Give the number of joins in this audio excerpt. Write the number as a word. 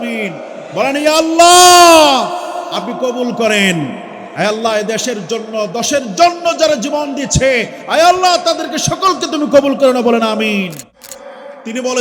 one